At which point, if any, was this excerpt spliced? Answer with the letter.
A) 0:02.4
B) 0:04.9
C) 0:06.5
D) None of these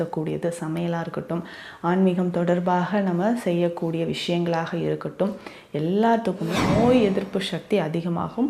C